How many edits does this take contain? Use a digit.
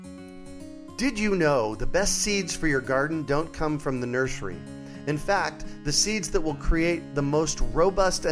1